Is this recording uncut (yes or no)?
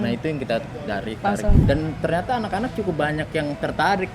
no